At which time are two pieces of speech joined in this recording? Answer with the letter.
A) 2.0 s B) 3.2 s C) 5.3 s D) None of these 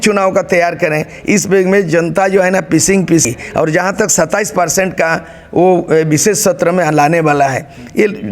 B